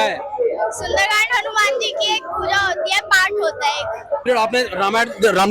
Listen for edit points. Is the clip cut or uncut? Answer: cut